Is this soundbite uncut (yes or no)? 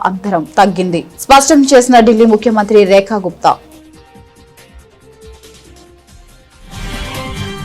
no